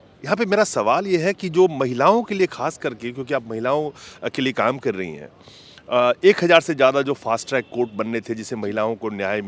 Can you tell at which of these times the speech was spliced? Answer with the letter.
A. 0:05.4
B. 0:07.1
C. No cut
C